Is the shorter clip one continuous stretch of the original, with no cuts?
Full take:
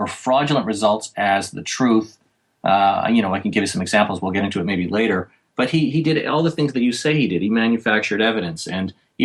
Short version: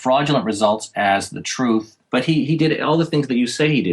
no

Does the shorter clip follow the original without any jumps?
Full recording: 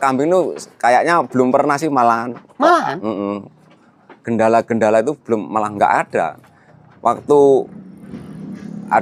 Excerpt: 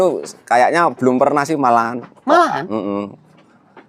yes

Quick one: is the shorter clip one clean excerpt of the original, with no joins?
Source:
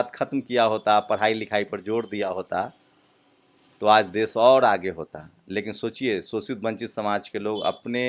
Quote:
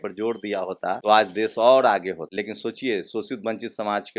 no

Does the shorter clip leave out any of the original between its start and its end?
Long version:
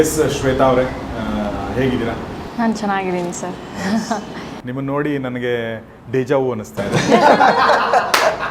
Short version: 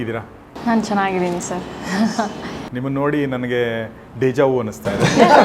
no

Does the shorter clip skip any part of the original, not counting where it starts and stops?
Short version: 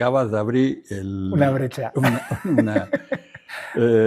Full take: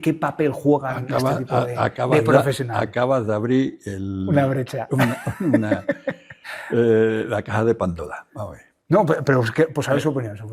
no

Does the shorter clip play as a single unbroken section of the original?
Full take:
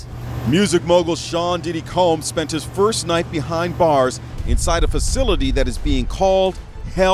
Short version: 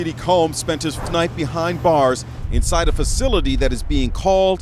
no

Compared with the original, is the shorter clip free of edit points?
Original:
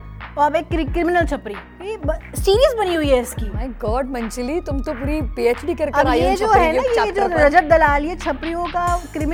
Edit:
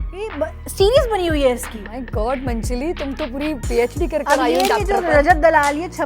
no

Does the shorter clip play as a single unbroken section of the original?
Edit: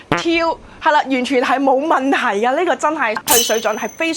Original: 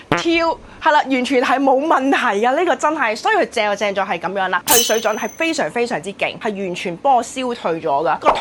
no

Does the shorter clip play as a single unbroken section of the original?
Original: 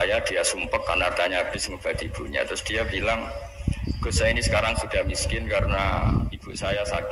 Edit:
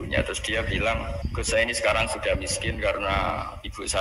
no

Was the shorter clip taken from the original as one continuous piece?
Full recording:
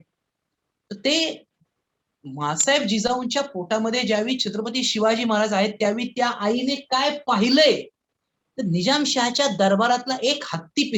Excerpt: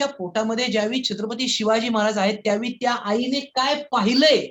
yes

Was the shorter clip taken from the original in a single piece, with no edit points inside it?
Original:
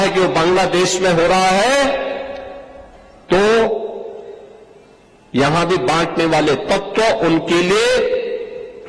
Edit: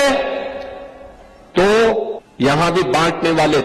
no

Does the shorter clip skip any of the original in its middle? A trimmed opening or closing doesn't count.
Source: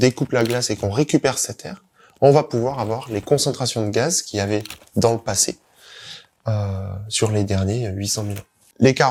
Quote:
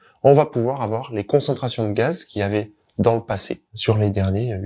yes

